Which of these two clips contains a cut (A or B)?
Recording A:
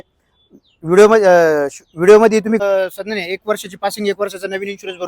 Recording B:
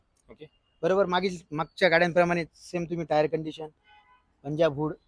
A